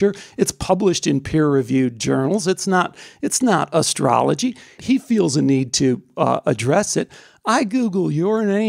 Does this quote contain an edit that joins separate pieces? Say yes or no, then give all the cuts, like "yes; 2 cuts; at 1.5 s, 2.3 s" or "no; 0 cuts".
yes; 1 cut; at 4.8 s